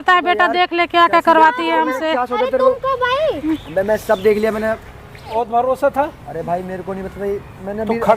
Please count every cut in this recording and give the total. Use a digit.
1